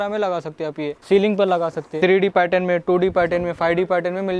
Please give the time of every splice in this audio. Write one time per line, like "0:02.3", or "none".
0:00.9
0:01.8